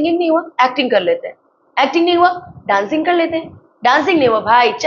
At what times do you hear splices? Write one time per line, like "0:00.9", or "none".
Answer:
none